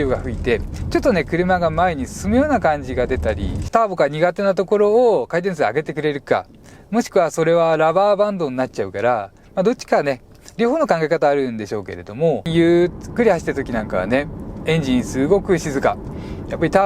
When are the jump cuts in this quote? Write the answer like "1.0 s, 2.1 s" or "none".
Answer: 3.6 s, 9.4 s, 12.5 s